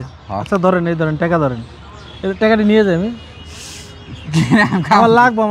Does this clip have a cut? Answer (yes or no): no